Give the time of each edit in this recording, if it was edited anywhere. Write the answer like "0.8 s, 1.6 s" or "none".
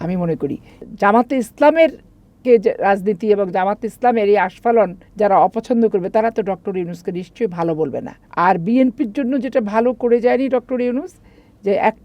0.8 s, 5.0 s, 8.2 s